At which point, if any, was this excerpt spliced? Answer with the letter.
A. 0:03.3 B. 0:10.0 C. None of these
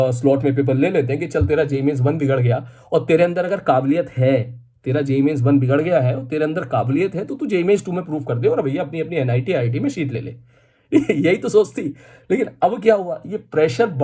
C